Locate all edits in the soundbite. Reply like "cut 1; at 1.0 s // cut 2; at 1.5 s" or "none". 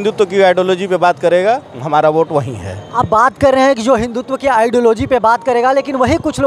none